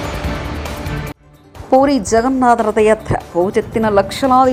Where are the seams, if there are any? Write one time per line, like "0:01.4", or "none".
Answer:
none